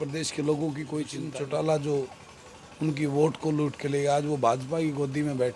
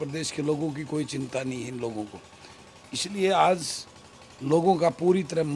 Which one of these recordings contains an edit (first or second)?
first